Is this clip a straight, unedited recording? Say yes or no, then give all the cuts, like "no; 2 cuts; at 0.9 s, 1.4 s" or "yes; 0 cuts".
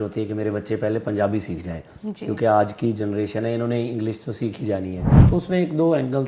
no; 1 cut; at 5.1 s